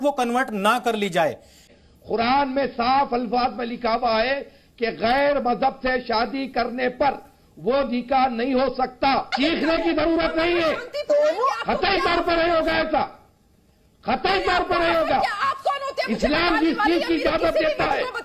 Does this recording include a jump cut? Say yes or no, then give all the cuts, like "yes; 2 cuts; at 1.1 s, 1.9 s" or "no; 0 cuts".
yes; 2 cuts; at 1.6 s, 9.3 s